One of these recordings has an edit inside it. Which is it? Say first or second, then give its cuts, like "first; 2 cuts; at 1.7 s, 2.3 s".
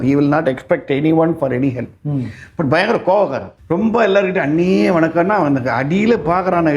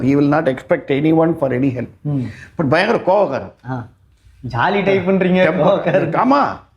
first; 1 cut; at 3.5 s